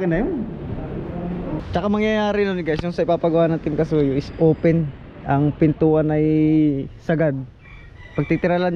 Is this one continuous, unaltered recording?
no; 1 cut; at 1.6 s

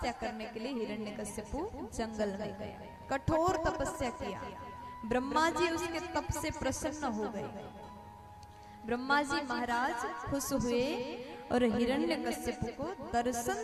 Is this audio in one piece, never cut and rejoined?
yes; 0 cuts

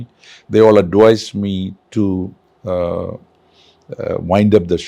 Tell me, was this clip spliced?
yes; 1 cut; at 2.5 s

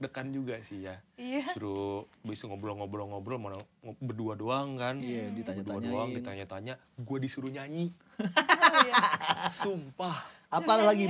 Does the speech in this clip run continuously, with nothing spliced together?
yes; 0 cuts

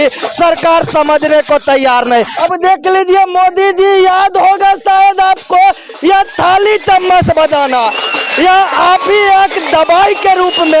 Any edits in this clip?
yes; 1 cut; at 2.3 s

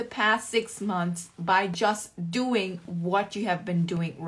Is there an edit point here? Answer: no; 0 cuts

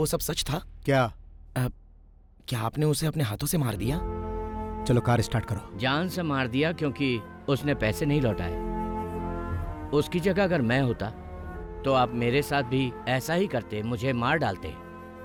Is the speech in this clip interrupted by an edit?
no; 0 cuts

